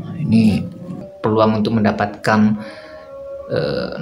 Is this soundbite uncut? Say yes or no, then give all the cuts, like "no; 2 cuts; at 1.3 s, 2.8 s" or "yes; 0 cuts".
no; 1 cut; at 1.0 s